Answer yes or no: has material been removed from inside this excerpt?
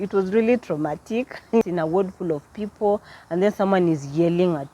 yes